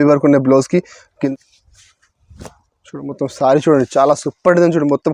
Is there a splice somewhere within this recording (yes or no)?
yes